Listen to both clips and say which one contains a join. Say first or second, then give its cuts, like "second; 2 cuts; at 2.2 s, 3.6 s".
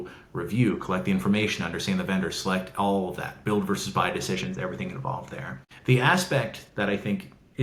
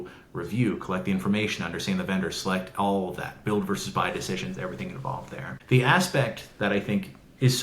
second; 1 cut; at 5.5 s